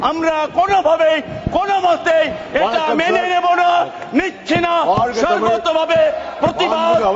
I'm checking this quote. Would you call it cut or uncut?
uncut